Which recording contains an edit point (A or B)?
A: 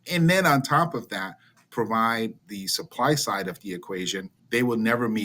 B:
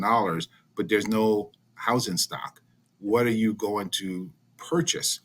A